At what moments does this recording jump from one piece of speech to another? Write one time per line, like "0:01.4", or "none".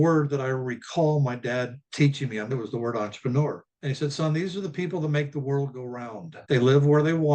0:02.5